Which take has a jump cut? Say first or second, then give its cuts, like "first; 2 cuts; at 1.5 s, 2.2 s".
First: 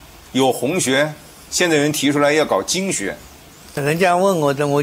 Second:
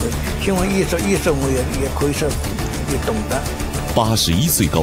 first; 1 cut; at 3.8 s